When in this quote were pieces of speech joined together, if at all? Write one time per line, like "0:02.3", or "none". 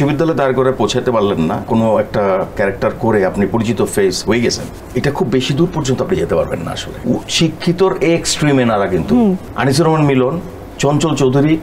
0:01.7
0:04.7
0:06.9
0:09.5

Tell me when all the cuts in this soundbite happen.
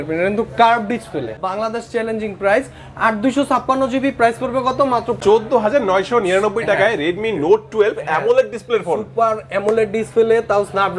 0:01.4
0:05.1

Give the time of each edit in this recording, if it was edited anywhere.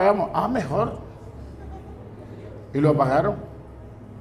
none

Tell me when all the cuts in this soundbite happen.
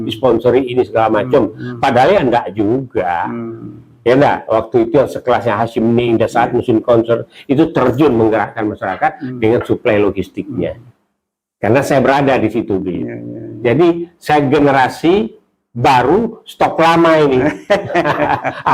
none

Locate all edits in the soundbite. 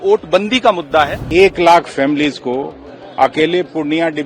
0:01.2

